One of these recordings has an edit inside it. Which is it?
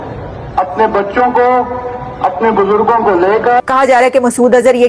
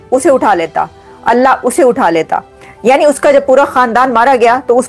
first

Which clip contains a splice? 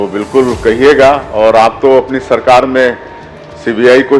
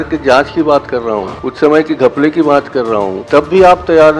second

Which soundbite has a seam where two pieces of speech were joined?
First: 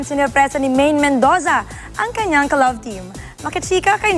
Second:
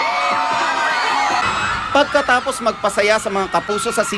second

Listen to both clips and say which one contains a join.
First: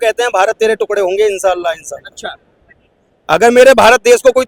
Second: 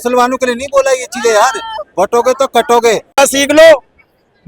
second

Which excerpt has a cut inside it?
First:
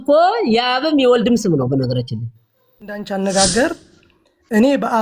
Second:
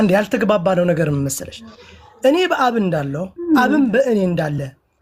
first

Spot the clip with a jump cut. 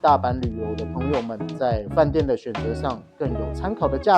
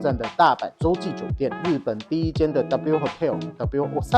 second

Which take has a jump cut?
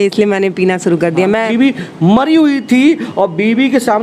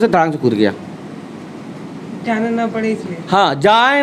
first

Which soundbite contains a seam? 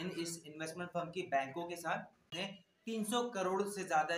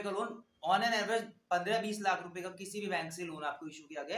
first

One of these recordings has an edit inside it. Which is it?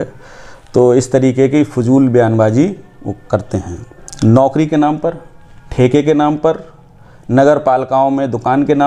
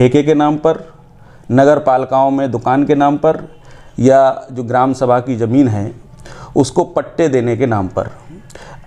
first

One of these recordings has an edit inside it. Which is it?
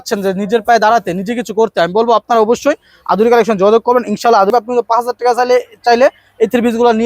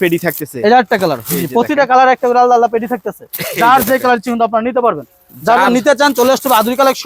first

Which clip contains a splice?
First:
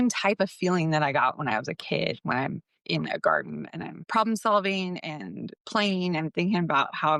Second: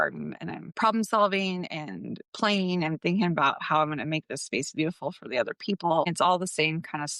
second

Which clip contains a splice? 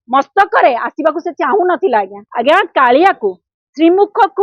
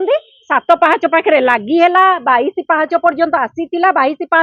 first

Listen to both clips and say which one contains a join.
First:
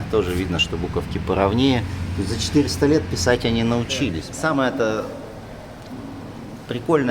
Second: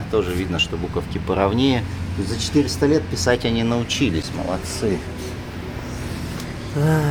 first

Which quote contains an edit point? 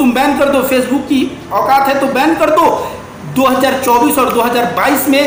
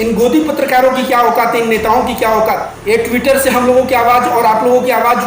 second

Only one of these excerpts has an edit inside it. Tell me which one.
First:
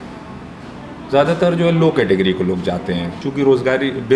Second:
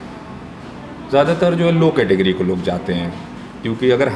first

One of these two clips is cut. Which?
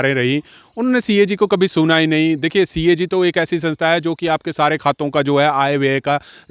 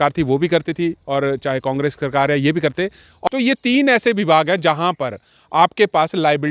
second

